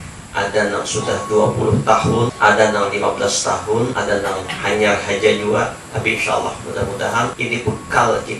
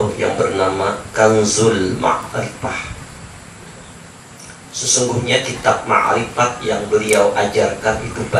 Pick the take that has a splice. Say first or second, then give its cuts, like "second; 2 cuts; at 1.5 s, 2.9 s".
first; 3 cuts; at 2.3 s, 3.9 s, 7.4 s